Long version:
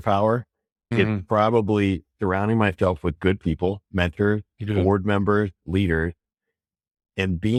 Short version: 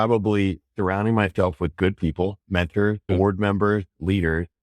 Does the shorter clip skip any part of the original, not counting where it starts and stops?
yes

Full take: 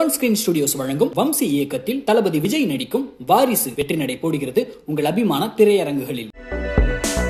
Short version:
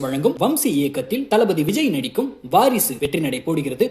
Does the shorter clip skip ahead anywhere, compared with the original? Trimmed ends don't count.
no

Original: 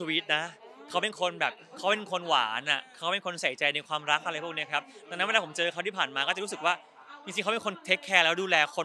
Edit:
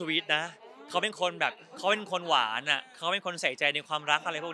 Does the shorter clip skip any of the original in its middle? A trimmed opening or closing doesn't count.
no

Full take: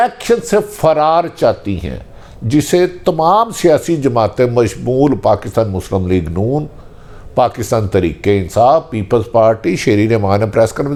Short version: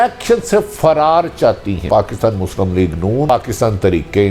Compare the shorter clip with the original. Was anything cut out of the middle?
yes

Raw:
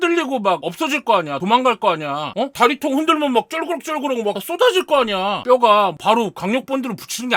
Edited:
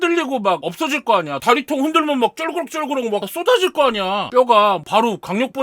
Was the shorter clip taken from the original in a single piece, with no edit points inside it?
no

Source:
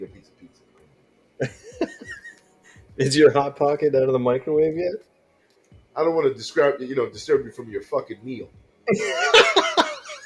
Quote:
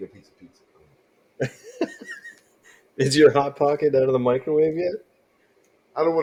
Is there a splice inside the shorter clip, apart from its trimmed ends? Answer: no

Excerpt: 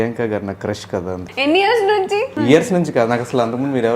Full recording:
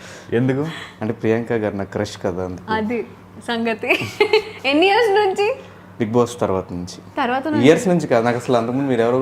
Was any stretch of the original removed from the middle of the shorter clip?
yes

